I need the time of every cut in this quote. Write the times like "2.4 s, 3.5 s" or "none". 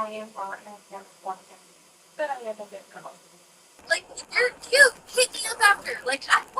3.7 s